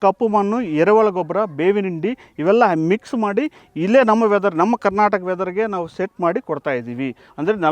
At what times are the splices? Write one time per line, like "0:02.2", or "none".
none